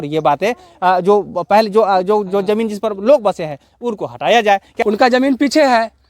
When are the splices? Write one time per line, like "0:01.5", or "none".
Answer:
0:04.7